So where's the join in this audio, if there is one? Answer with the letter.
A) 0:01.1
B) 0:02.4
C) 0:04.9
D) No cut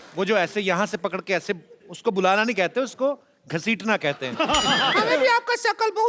C